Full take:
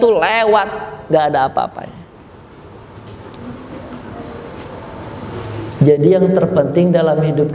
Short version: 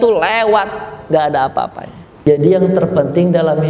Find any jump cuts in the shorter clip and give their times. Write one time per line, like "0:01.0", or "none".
0:02.2

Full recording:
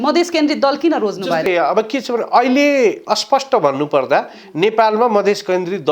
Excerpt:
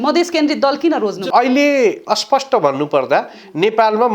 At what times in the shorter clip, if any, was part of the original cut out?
0:01.2

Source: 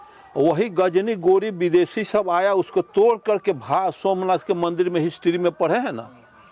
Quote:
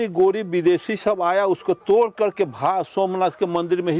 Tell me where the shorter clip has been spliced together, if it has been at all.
none

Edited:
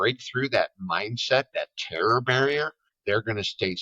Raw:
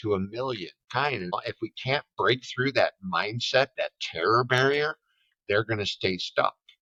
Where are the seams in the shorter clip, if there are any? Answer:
0:02.9

